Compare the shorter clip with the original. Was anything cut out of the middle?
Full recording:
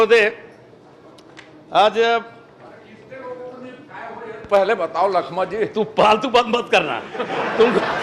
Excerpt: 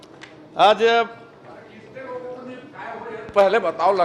no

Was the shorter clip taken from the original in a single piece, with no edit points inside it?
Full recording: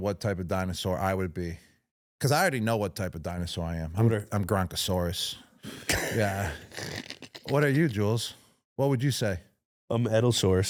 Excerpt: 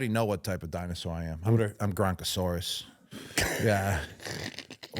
yes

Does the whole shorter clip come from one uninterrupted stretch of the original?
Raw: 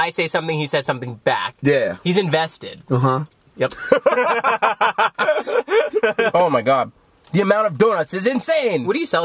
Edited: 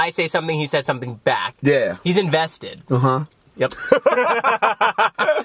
yes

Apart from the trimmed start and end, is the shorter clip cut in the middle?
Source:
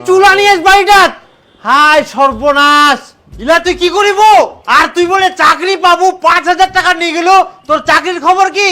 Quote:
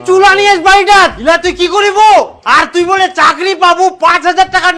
yes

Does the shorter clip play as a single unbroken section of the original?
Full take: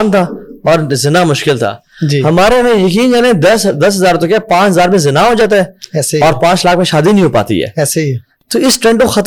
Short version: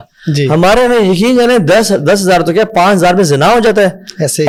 yes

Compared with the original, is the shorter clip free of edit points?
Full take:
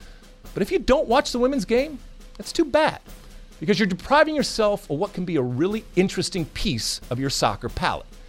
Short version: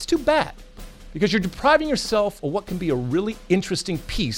yes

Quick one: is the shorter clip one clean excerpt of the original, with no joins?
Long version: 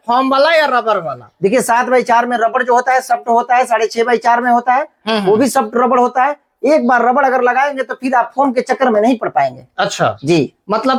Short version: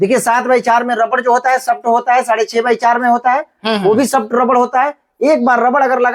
yes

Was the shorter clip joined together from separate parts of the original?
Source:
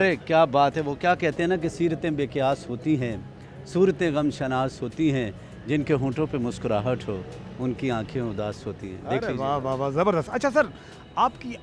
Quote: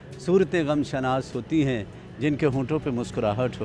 no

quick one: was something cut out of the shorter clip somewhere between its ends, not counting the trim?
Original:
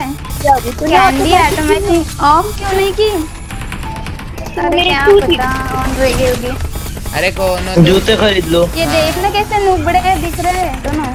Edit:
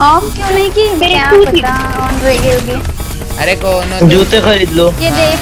yes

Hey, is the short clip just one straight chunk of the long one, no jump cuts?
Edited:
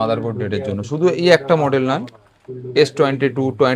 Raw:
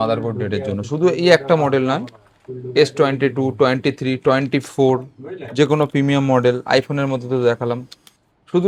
yes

